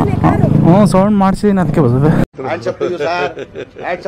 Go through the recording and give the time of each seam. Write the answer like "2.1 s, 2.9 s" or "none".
2.2 s